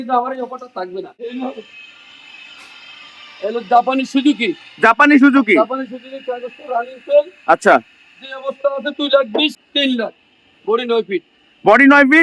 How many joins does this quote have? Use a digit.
2